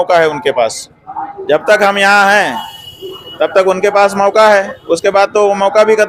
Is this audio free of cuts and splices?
yes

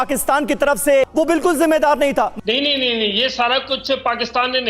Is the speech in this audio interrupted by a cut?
yes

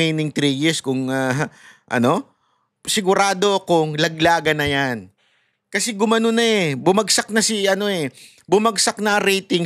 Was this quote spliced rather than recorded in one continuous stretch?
no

